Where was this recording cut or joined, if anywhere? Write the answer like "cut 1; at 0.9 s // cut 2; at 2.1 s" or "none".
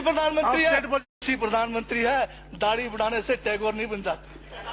cut 1; at 1.2 s

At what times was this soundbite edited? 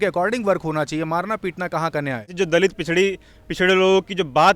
cut 1; at 2.3 s

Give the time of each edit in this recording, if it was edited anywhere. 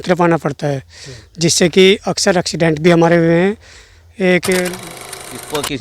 cut 1; at 4.9 s

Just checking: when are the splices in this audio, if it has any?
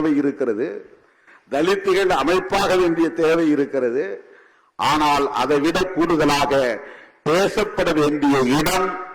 none

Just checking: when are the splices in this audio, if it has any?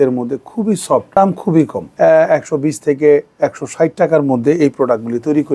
cut 1; at 1.1 s // cut 2; at 1.8 s

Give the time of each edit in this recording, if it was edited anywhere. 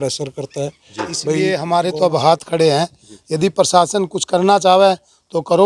cut 1; at 1.4 s

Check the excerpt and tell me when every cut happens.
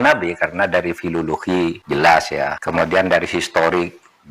cut 1; at 1.8 s // cut 2; at 2.6 s

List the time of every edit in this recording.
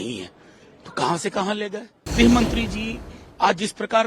cut 1; at 2.0 s

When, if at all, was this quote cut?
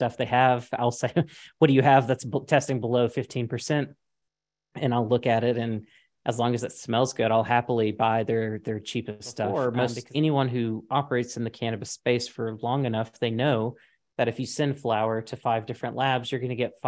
cut 1; at 9.5 s

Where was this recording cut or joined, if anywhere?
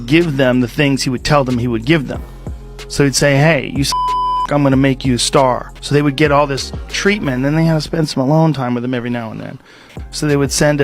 cut 1; at 5.7 s // cut 2; at 9.7 s

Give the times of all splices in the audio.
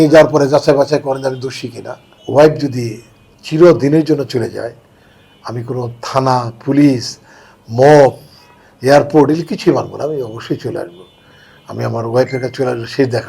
cut 1; at 2.2 s

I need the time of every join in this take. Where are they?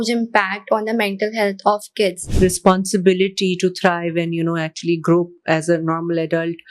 cut 1; at 2.2 s

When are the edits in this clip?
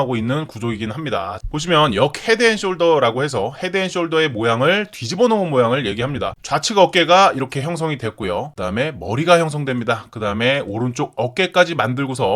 none

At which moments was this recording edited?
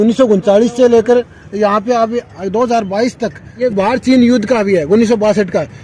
cut 1; at 3.6 s

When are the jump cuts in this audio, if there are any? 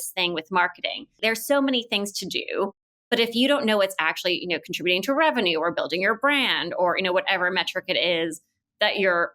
cut 1; at 1.2 s

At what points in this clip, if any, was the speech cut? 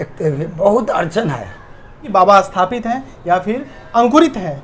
cut 1; at 2.0 s

